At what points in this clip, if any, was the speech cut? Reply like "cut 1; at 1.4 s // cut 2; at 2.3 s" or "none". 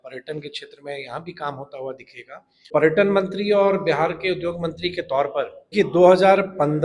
cut 1; at 2.7 s // cut 2; at 5.7 s